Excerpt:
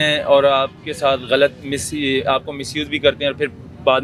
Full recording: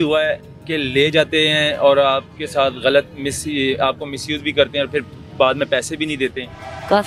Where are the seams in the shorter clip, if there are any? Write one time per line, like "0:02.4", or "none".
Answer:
none